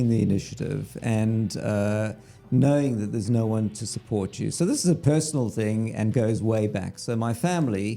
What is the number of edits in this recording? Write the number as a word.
zero